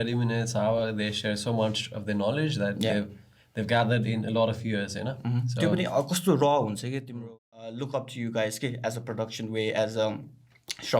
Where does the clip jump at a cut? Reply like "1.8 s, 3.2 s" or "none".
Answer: 7.1 s